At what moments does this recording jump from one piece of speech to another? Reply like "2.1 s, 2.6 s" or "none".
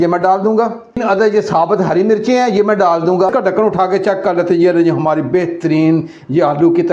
1.0 s, 3.3 s